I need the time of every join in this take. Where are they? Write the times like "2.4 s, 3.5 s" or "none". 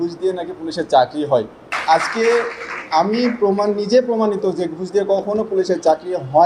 1.6 s